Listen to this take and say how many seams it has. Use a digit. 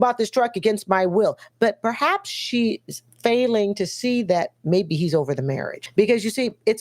1